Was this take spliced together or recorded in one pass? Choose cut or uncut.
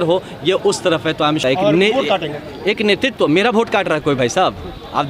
cut